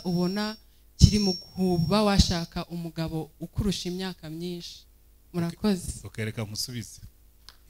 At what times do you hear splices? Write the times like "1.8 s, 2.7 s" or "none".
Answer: none